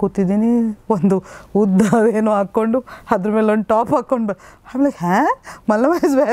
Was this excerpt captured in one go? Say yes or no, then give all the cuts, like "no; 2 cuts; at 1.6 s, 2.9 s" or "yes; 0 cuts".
yes; 0 cuts